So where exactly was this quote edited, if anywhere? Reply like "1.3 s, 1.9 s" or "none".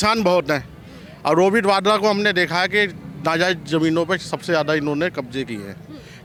none